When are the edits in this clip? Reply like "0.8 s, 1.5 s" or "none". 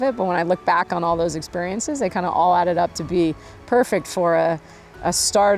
none